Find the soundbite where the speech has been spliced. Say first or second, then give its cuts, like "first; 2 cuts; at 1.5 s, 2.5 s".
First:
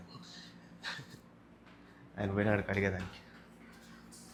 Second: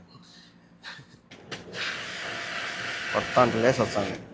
second; 1 cut; at 1.3 s